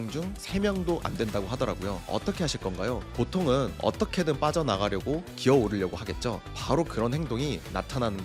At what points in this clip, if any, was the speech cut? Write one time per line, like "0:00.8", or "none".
0:02.0